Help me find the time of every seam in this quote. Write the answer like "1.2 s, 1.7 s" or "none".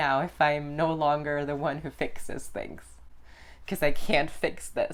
none